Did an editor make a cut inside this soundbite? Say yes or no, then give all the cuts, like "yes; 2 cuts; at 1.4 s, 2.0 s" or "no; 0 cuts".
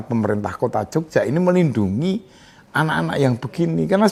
no; 0 cuts